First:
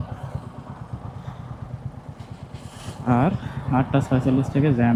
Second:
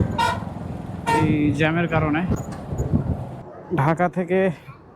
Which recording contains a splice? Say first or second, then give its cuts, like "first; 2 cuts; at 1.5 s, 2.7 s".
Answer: second; 1 cut; at 3.5 s